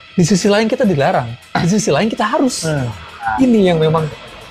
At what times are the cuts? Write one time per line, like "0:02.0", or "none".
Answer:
0:01.4
0:03.3